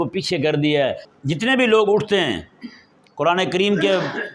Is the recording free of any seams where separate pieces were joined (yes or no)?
no